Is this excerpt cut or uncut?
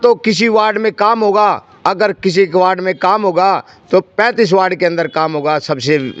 uncut